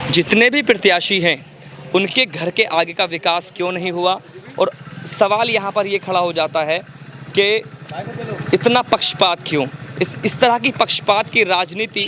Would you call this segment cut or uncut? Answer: uncut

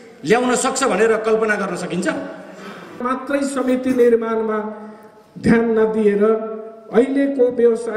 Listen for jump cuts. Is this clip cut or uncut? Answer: cut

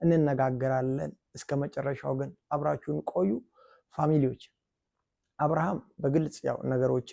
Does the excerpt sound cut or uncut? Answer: cut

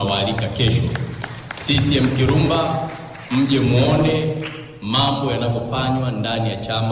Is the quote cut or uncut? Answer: uncut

